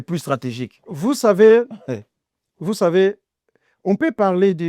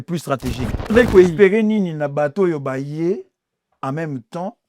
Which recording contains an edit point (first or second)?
second